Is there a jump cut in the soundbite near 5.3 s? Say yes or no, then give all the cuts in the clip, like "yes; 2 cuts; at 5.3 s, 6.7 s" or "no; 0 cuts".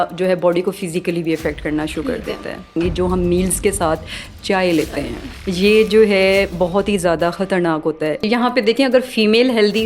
no; 2 cuts; at 2.8 s, 8.2 s